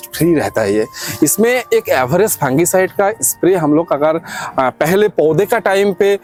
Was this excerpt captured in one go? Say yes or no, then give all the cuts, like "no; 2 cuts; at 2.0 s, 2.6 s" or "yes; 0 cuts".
yes; 0 cuts